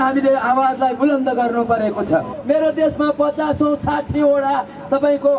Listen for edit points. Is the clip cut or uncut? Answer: cut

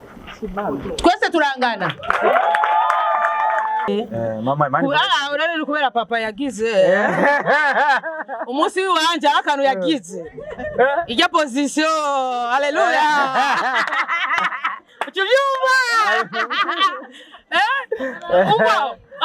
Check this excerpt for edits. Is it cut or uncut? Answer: cut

